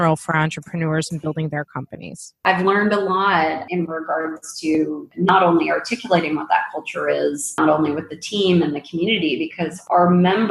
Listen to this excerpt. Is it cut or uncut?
cut